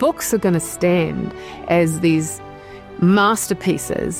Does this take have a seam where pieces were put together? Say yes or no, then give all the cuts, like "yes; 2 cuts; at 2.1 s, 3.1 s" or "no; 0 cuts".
no; 0 cuts